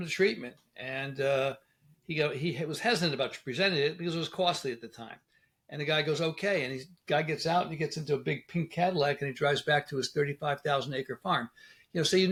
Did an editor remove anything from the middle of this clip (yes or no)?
no